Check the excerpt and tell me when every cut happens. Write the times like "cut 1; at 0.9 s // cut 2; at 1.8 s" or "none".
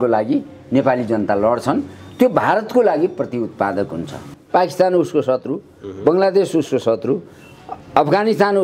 cut 1; at 4.3 s